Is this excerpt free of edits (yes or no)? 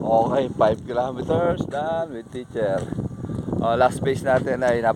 yes